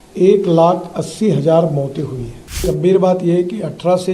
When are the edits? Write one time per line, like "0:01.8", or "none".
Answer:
0:02.6